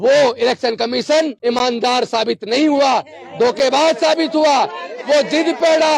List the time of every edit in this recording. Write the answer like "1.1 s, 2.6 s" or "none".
1.3 s